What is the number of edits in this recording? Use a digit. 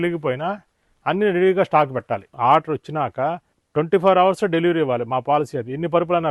1